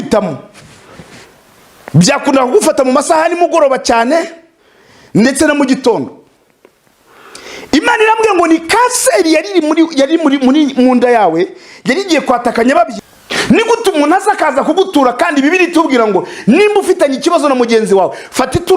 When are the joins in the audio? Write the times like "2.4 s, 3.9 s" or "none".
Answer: 12.9 s